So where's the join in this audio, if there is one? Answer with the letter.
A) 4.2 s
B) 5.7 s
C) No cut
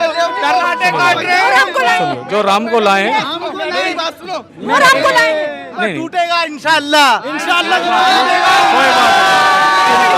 B